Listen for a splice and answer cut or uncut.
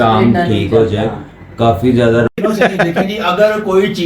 cut